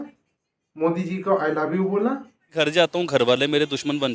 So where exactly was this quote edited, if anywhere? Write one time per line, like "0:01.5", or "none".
0:02.6